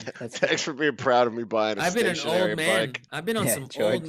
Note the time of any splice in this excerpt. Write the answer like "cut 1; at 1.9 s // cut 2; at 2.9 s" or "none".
cut 1; at 3.0 s